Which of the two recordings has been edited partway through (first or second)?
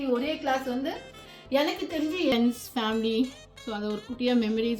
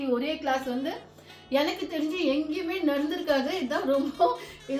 first